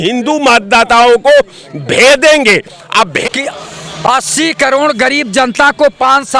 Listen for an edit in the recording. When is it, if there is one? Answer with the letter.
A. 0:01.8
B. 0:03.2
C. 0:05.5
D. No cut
B